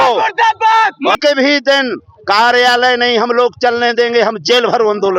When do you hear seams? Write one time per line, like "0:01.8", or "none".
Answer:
0:01.2